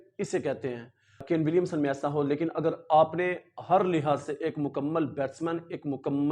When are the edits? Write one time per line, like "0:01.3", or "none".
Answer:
0:01.2